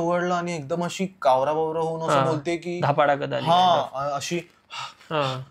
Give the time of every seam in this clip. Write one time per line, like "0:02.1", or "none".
none